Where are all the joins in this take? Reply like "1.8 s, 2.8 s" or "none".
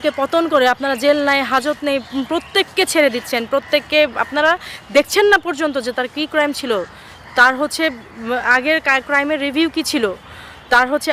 none